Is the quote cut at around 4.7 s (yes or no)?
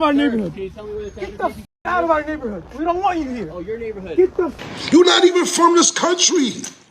yes